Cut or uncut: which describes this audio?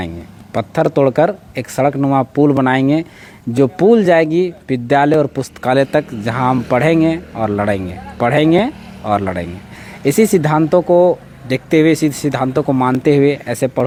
uncut